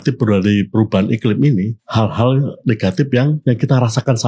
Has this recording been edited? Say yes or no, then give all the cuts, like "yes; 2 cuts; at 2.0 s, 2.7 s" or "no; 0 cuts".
yes; 2 cuts; at 1.8 s, 3.4 s